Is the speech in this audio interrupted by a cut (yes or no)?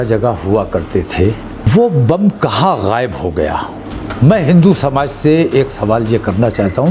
yes